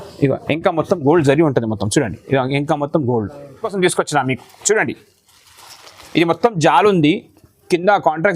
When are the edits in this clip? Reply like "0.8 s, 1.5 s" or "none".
3.7 s